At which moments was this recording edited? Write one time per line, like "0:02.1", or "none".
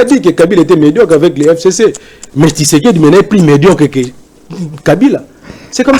none